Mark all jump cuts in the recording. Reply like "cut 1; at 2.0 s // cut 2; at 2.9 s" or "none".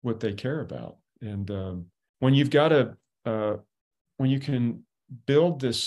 cut 1; at 2.1 s